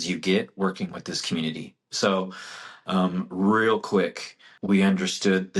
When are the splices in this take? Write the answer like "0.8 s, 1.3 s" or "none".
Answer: none